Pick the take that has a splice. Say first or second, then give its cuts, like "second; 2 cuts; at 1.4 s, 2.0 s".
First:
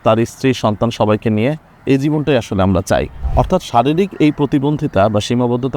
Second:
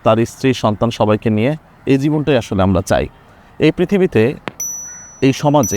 first; 1 cut; at 3.2 s